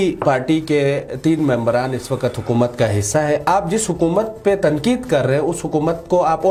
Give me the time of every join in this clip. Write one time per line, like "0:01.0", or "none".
none

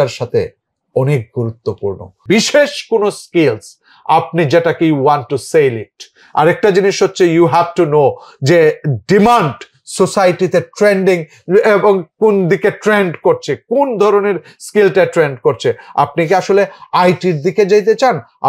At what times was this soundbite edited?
0:02.2

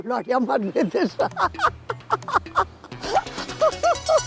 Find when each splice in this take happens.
none

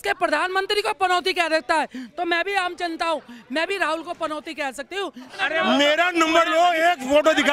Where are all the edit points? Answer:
0:05.4

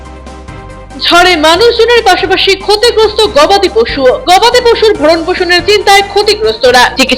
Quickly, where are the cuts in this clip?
0:00.9

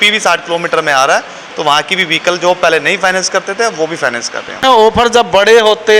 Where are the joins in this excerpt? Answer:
0:04.8

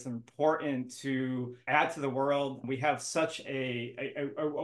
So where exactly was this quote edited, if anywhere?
0:01.6
0:02.6

